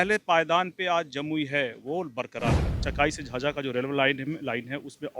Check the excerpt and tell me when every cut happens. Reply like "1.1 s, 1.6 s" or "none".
2.8 s